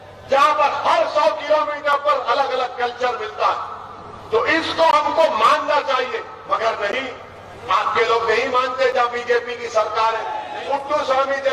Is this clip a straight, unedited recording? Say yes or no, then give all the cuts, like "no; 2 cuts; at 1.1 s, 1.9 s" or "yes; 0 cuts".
no; 1 cut; at 10.4 s